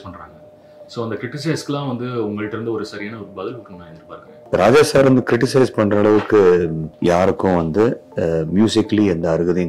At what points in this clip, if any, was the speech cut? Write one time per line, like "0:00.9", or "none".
0:04.4